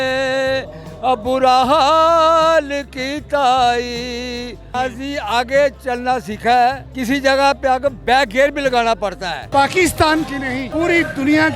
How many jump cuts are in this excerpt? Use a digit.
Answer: 4